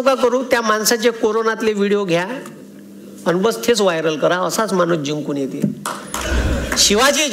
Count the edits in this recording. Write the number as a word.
one